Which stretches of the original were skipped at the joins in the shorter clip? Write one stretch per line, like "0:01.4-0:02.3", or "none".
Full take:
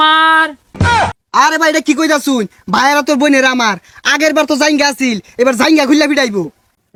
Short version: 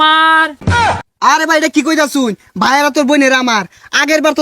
0:00.9-0:01.0

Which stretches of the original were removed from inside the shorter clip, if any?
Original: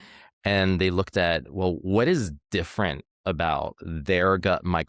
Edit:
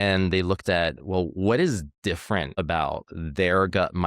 0:03.0-0:03.2

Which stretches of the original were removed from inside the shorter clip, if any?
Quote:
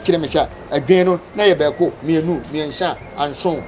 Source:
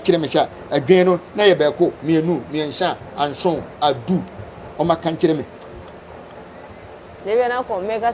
none

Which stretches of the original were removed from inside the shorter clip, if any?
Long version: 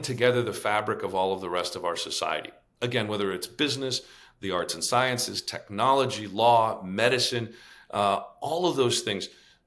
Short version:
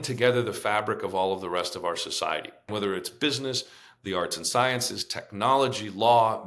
0:02.7-0:03.1

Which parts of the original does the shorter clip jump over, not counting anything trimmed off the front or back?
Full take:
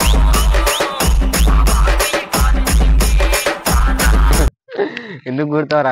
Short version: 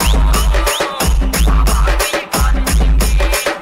none

